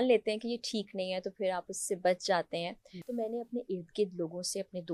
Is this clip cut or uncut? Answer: cut